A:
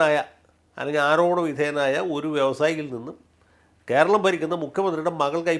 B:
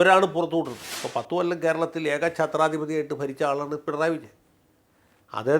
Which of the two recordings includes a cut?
B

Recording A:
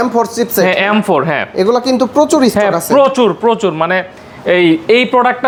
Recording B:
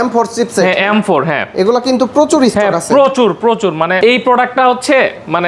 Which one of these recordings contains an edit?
B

